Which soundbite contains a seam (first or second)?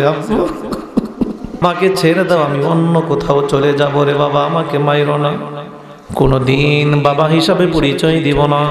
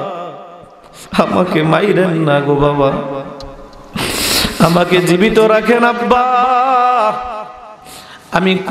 first